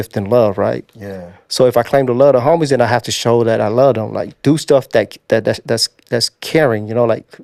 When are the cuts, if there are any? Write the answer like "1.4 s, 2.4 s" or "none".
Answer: none